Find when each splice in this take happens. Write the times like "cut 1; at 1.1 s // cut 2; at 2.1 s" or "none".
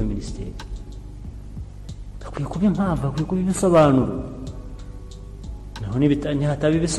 cut 1; at 1.3 s // cut 2; at 5.1 s